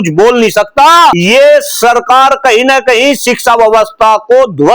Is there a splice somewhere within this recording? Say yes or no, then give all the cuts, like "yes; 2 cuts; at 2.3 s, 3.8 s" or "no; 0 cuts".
yes; 1 cut; at 1.2 s